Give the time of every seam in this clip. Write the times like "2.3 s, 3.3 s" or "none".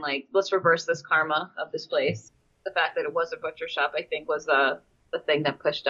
none